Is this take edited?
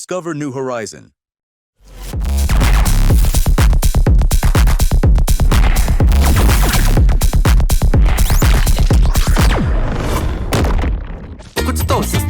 yes; 1 cut; at 11.4 s

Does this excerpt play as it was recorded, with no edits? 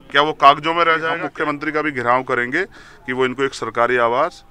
no; 1 cut; at 1.3 s

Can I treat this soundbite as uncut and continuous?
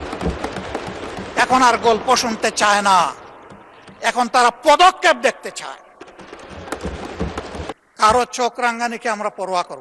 no; 1 cut; at 7.8 s

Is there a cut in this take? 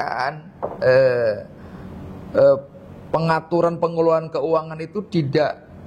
no; 0 cuts

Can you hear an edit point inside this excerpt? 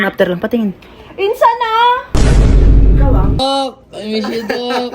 yes; 1 cut; at 3.4 s

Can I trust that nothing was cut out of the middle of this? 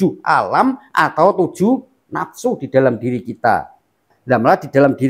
no; 1 cut; at 4.1 s

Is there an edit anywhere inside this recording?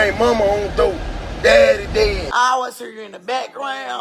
yes; 1 cut; at 2.2 s

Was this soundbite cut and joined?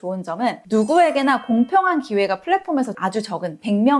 yes; 1 cut; at 3.0 s

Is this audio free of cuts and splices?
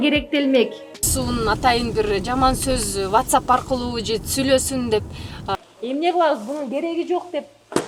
no; 2 cuts; at 1.0 s, 5.5 s

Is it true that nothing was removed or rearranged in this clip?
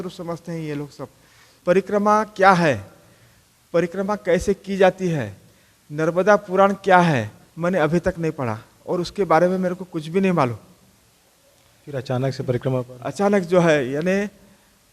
no; 1 cut; at 1.4 s

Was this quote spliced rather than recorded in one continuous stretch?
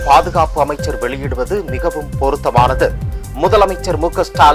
no; 0 cuts

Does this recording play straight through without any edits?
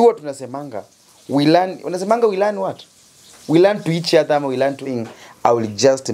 no; 1 cut; at 4.8 s

